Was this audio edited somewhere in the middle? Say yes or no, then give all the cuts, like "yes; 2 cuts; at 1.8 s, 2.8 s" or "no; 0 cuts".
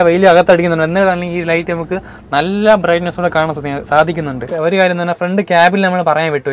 yes; 1 cut; at 4.4 s